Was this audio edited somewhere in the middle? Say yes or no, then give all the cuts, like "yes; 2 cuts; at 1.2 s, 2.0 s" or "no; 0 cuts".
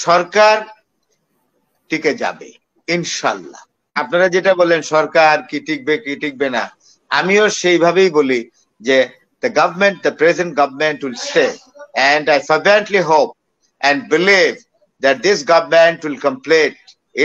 yes; 1 cut; at 4.0 s